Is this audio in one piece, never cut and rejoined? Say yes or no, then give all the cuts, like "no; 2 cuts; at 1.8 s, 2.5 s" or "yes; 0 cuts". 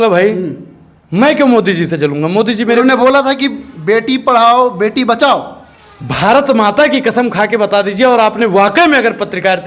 yes; 0 cuts